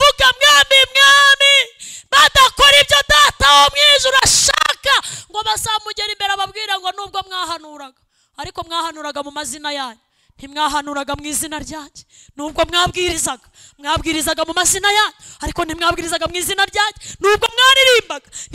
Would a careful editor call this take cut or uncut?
uncut